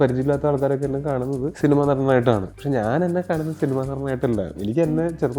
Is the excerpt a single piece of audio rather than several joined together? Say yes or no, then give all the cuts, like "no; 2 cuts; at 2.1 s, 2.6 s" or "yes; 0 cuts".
no; 2 cuts; at 1.5 s, 2.5 s